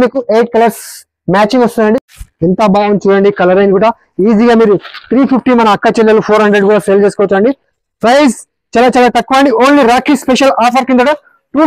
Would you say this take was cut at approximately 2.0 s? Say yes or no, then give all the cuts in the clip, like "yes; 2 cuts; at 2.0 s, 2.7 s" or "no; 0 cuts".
yes; 1 cut; at 2.0 s